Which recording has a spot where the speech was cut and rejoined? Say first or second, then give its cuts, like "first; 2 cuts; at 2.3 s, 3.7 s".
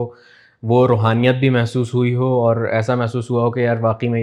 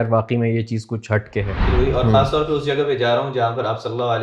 second; 1 cut; at 1.7 s